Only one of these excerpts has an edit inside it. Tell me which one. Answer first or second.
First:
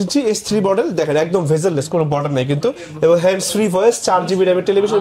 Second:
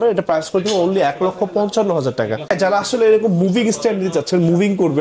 second